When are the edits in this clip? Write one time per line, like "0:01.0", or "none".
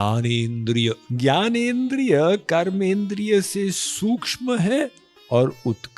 0:01.1